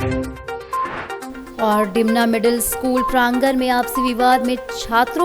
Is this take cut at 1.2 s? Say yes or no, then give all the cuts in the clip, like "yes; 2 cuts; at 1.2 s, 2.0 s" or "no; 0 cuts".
yes; 1 cut; at 1.2 s